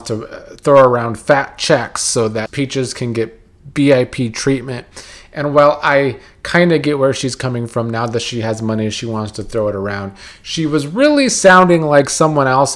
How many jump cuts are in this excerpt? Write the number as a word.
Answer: one